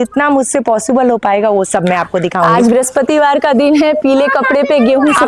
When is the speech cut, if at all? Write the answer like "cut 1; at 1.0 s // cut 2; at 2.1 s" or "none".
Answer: cut 1; at 2.5 s